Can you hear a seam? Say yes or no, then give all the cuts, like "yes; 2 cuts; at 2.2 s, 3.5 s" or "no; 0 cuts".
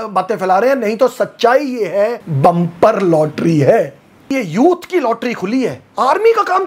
yes; 2 cuts; at 2.2 s, 4.3 s